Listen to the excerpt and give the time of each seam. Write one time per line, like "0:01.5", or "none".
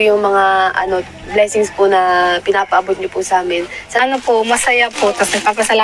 0:03.8